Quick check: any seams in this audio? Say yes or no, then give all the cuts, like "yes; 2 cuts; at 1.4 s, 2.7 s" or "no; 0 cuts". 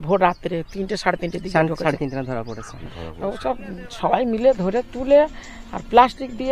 no; 0 cuts